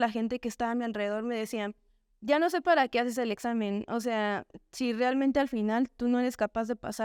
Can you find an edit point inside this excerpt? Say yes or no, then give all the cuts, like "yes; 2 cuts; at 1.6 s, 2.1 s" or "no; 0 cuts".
no; 0 cuts